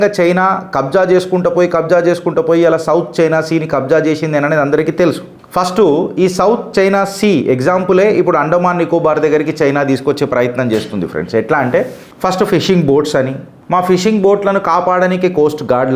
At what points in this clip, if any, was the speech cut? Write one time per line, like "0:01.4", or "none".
none